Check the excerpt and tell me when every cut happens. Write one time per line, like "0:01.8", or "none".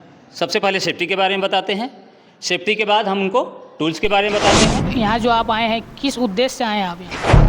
0:05.0